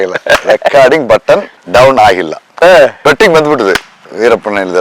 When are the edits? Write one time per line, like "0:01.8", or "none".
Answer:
0:01.5
0:03.0

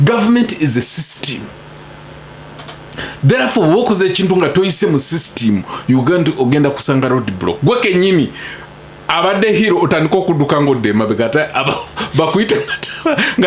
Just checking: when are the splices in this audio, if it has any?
none

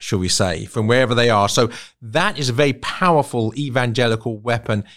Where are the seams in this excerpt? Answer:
none

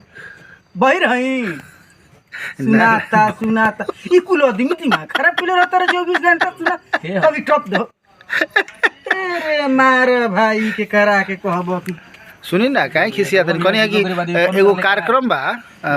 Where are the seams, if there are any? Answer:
none

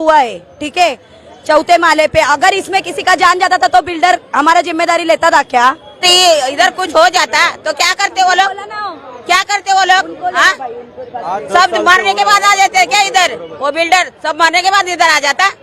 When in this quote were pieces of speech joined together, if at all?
0:06.1

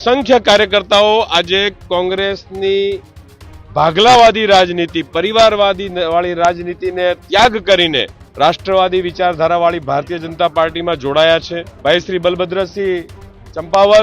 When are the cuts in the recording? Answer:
0:08.2
0:11.7

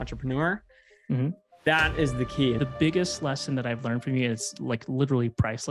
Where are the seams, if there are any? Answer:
0:02.6

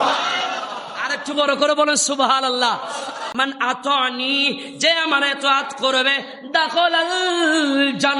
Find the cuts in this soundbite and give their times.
0:03.2

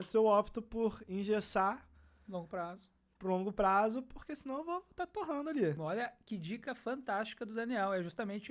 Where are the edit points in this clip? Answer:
0:05.8

